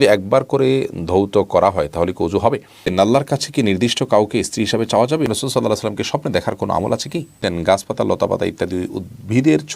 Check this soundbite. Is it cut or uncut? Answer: cut